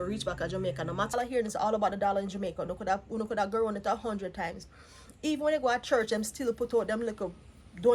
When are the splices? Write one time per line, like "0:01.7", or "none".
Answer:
0:01.1